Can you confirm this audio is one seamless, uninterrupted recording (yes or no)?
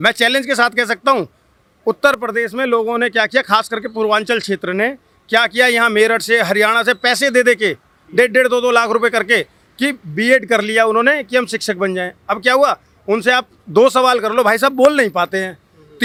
yes